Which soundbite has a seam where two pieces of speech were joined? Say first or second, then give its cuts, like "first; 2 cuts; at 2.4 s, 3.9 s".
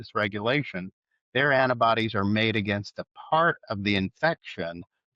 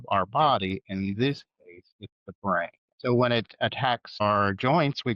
second; 2 cuts; at 2.8 s, 4.2 s